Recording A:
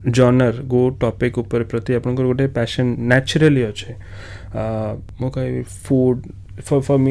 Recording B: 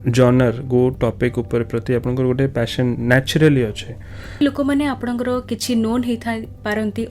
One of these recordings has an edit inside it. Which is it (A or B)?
B